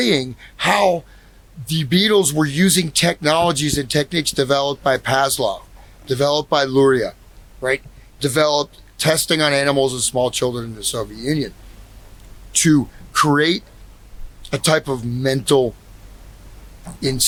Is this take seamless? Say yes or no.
yes